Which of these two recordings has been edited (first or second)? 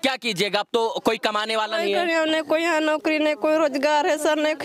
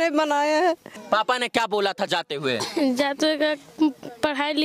second